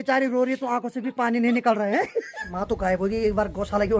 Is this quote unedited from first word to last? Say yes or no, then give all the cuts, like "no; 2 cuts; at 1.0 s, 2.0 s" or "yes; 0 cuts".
no; 1 cut; at 2.5 s